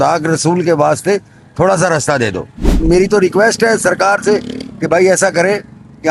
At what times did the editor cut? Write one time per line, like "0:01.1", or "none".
0:02.8